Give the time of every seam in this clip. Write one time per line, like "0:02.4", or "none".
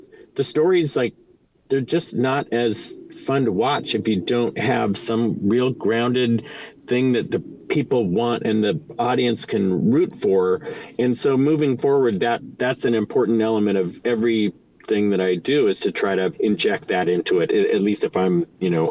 0:12.5
0:13.9
0:16.4